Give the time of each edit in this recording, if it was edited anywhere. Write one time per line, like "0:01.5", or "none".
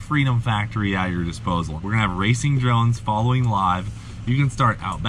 0:01.7